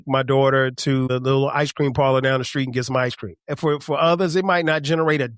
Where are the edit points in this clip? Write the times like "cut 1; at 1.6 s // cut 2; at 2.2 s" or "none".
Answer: cut 1; at 1.1 s // cut 2; at 3.5 s